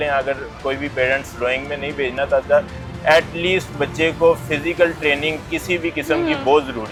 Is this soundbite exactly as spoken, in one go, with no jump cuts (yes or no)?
yes